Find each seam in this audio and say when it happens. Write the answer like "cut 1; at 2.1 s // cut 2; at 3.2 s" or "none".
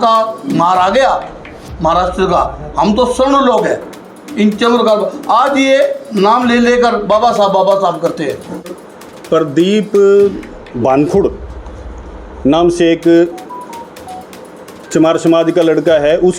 cut 1; at 8.7 s